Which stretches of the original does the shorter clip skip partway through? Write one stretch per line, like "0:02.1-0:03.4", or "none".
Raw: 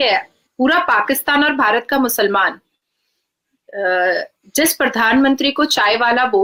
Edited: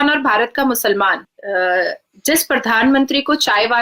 0:02.6-0:03.6